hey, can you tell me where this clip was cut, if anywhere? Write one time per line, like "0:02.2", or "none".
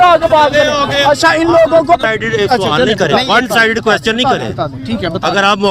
0:02.0